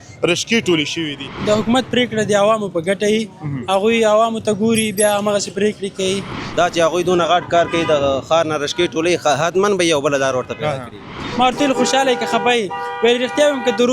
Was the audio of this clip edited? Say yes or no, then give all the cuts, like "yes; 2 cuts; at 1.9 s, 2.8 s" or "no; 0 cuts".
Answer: yes; 3 cuts; at 1.3 s, 6.4 s, 11.2 s